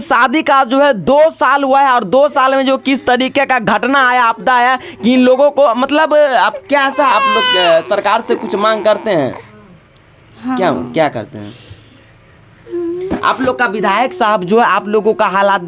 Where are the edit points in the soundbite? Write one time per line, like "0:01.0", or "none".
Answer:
none

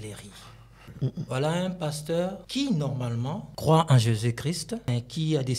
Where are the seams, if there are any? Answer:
0:00.9
0:02.4
0:03.5
0:04.9

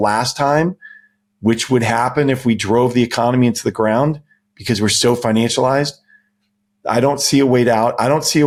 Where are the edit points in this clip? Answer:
none

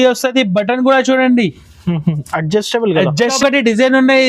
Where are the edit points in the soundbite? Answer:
0:03.3

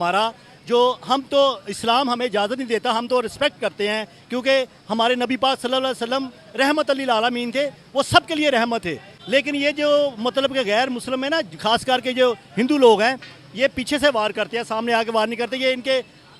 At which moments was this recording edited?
none

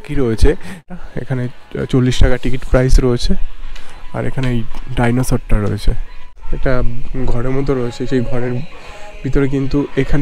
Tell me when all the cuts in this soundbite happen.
0:00.8
0:06.4

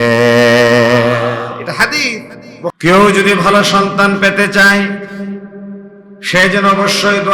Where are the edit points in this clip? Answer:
0:02.7

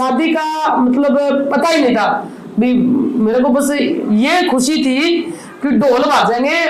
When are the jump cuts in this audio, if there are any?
none

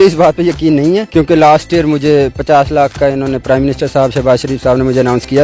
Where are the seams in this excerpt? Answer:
0:01.1

